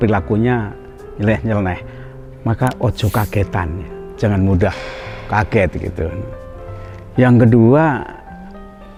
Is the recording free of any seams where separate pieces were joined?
yes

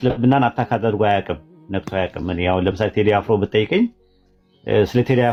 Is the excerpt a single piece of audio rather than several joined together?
yes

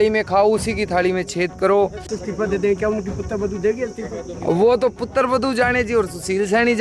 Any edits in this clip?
yes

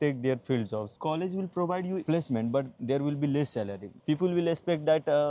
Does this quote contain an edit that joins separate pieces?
no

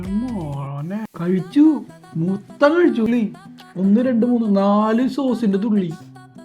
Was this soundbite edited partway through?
yes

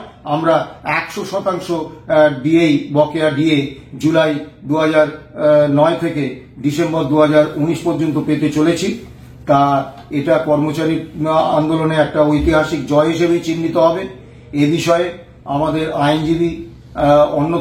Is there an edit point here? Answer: no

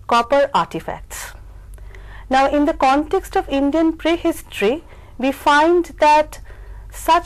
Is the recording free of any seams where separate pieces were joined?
no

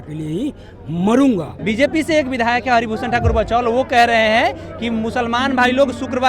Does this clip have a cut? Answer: yes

